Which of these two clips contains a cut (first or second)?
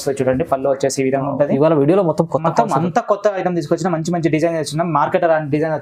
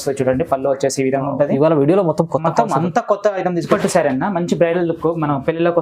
second